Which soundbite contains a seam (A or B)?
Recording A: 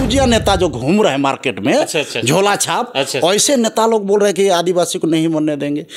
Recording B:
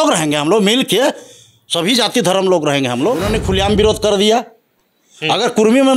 B